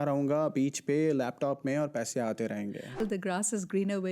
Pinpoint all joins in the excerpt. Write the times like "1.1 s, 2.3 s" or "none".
3.0 s